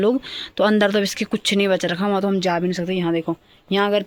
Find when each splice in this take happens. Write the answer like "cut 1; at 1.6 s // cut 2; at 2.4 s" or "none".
none